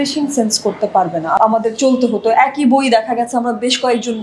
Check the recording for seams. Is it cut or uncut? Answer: cut